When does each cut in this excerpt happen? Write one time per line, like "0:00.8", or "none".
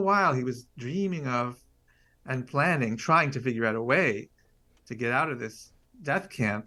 none